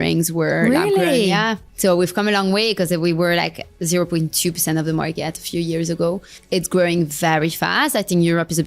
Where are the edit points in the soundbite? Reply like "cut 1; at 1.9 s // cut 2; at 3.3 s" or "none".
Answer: cut 1; at 1.6 s // cut 2; at 6.4 s